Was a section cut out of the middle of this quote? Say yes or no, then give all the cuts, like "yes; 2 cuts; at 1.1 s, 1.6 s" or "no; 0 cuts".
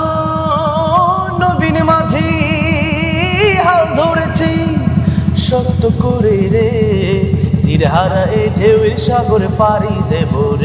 no; 0 cuts